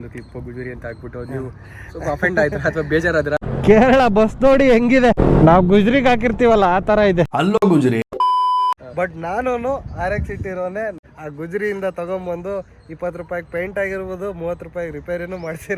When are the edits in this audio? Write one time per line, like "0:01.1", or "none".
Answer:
0:03.4
0:05.2
0:08.8
0:11.0